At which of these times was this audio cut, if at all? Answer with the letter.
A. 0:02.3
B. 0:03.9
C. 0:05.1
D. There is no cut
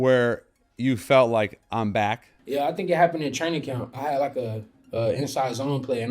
B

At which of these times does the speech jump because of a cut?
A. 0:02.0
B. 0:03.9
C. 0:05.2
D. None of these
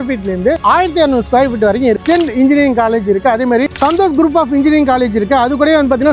A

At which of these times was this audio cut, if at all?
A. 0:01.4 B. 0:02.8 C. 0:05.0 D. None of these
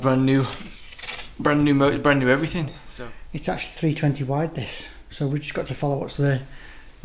B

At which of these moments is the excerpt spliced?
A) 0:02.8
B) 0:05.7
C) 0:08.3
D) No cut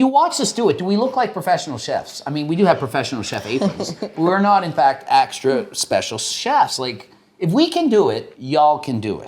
C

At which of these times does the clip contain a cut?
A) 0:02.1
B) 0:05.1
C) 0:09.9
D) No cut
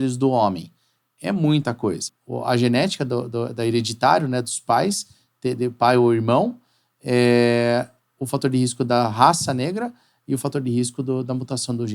A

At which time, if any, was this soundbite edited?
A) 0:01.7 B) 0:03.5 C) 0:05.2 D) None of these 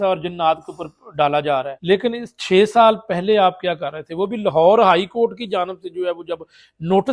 A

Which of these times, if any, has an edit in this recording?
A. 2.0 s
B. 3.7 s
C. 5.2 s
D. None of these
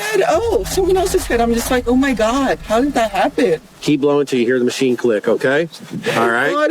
B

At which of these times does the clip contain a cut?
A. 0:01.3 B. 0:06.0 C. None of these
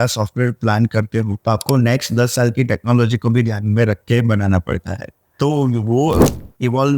A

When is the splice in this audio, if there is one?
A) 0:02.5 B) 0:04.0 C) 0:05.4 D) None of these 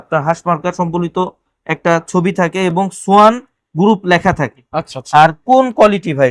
D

